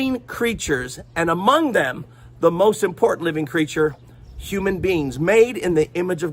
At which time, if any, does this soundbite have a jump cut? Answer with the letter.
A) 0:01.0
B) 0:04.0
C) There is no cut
C